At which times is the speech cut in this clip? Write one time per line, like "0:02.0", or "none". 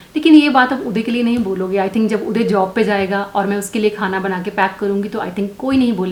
none